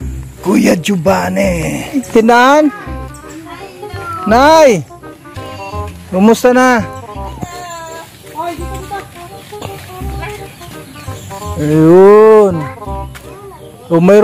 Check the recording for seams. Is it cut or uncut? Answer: cut